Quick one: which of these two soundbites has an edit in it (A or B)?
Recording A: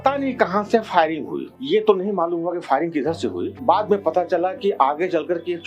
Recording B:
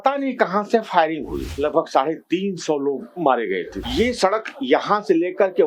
B